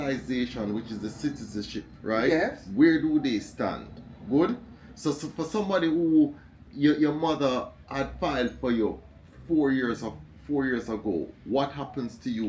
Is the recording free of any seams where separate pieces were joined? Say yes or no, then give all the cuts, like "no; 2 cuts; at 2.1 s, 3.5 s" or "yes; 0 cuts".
yes; 0 cuts